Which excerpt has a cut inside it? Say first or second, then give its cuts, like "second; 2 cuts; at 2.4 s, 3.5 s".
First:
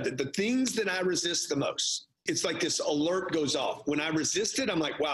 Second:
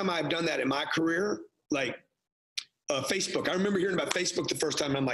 first; 1 cut; at 2.2 s